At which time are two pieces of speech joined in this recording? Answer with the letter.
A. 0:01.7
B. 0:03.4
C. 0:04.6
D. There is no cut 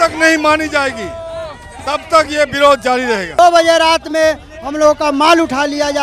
B